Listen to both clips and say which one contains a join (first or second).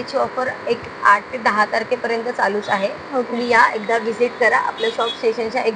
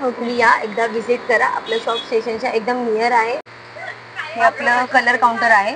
second